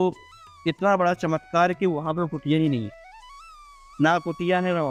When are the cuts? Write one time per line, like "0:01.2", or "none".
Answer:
none